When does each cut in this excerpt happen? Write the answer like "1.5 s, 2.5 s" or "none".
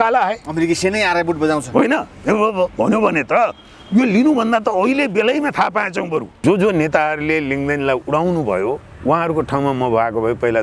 6.3 s